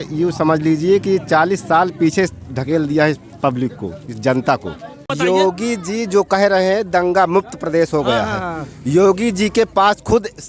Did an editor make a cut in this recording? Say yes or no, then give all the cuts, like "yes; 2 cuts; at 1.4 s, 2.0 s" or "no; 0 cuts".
yes; 1 cut; at 5.1 s